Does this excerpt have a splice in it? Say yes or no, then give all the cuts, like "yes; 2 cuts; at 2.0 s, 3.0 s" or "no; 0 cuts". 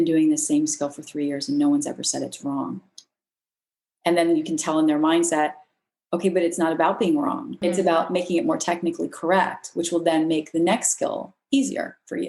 yes; 1 cut; at 7.5 s